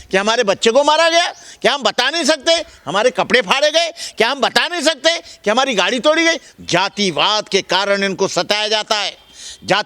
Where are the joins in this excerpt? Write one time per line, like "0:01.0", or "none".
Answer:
0:06.5